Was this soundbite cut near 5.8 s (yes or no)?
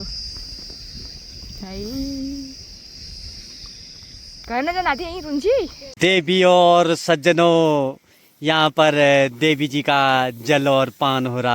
yes